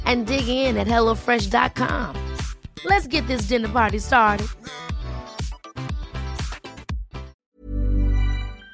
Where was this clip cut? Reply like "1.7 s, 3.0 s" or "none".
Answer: 7.5 s